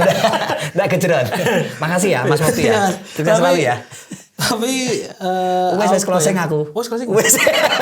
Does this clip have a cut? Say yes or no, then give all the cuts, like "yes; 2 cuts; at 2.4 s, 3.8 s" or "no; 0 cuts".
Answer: no; 0 cuts